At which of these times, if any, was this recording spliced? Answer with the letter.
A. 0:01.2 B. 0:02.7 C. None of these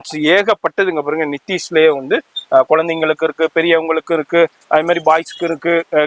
C